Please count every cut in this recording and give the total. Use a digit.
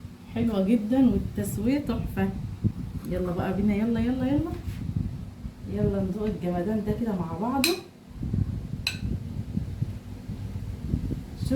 1